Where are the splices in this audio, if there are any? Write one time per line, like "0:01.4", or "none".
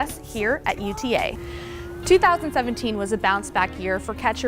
0:01.5